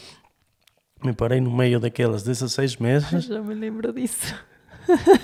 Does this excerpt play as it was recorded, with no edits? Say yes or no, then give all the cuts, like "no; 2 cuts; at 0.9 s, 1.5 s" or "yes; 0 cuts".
yes; 0 cuts